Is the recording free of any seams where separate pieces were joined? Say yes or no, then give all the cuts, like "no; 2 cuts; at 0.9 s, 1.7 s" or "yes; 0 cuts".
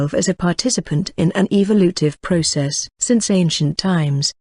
no; 1 cut; at 2.2 s